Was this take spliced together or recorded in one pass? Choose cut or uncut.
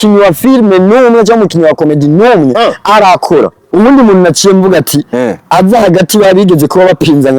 cut